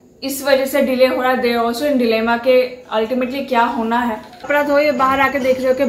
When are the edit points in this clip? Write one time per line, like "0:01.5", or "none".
0:04.4

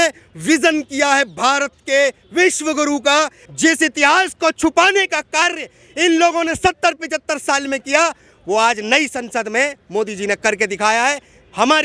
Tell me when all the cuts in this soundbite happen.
0:03.4

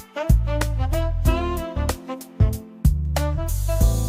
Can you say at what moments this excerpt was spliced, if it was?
none

